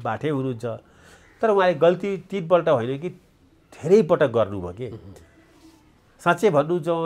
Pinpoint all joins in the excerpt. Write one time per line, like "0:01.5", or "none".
none